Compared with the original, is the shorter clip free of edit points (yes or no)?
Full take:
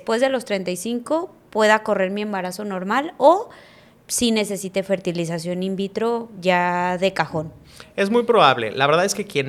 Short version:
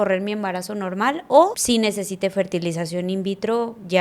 no